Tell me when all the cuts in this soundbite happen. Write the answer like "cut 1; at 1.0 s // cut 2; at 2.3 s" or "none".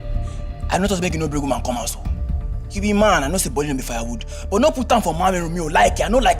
none